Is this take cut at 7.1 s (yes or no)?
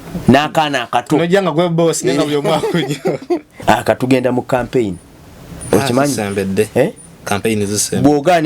no